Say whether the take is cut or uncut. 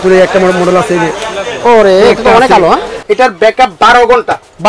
cut